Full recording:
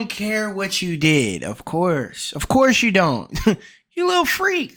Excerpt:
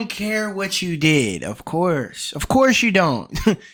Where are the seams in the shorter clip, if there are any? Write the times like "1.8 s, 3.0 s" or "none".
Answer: none